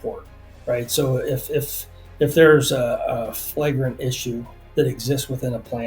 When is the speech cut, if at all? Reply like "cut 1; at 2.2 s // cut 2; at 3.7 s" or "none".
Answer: cut 1; at 4.5 s